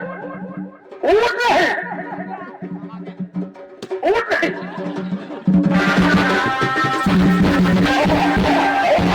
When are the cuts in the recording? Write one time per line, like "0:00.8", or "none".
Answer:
0:07.9